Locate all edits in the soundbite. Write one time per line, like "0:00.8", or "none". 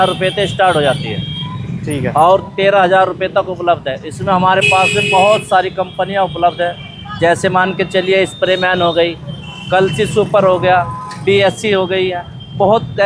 none